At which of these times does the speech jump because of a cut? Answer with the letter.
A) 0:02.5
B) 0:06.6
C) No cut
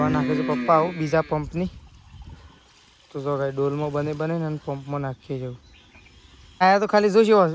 B